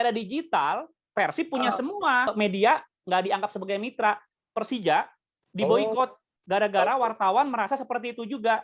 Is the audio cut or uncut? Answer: cut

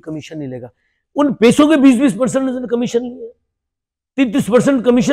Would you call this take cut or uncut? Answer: uncut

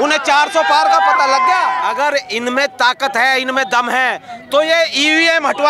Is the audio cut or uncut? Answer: cut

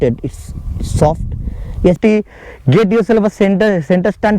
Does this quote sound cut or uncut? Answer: cut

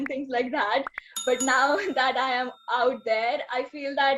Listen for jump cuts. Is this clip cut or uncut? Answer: uncut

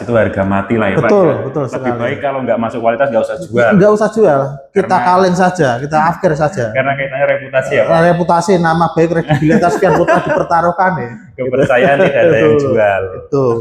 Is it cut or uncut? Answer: uncut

